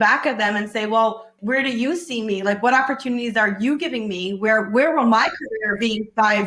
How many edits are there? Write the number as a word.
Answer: one